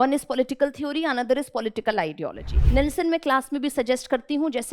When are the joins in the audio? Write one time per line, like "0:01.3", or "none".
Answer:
0:02.5